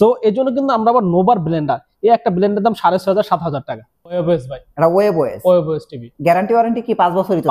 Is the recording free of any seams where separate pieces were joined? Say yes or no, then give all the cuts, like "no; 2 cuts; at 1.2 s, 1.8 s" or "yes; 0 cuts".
no; 1 cut; at 4.2 s